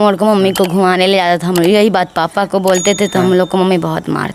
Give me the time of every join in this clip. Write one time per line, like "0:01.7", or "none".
none